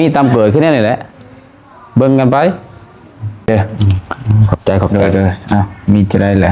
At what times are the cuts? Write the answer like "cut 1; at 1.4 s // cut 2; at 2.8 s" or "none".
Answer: cut 1; at 3.5 s